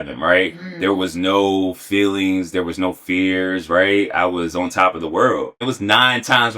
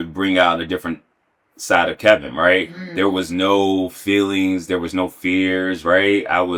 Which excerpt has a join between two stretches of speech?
first; 1 cut; at 5.7 s

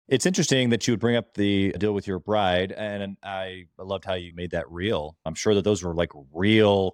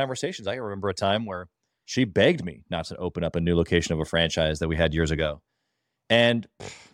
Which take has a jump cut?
first; 2 cuts; at 4.3 s, 5.3 s

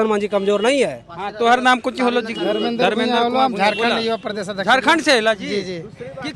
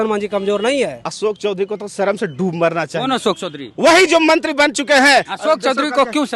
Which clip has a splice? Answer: second; 2 cuts; at 1.0 s, 5.3 s

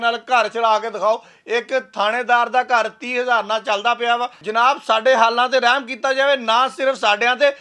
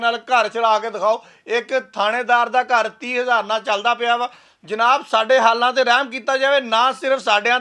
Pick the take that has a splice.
first; 1 cut; at 4.4 s

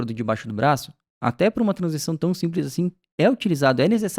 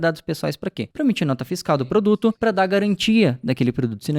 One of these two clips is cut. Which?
second; 2 cuts; at 0.8 s, 2.4 s

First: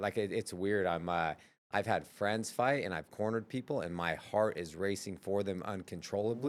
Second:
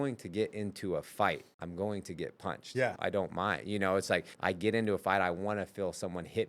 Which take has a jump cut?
second; 3 cuts; at 1.5 s, 2.9 s, 4.3 s

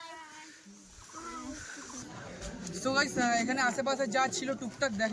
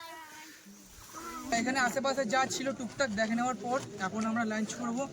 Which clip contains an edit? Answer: second; 1 cut; at 1.5 s

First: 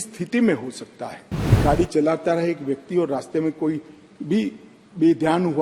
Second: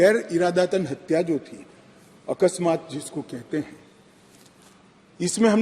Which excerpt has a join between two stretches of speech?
first; 1 cut; at 1.6 s

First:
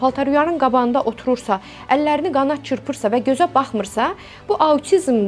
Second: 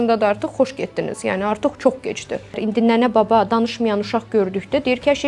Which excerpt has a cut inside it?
second; 1 cut; at 2.6 s

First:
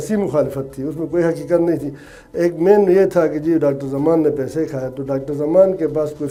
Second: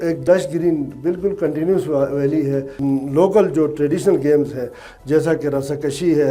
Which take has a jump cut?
second; 1 cut; at 2.7 s

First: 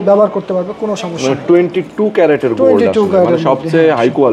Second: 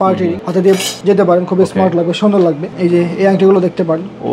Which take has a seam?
second; 2 cuts; at 0.8 s, 2.7 s

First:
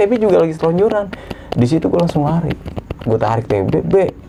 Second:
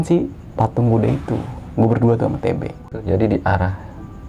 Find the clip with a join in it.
second; 1 cut; at 2.9 s

